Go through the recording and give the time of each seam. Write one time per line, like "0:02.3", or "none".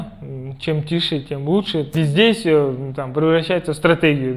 0:01.9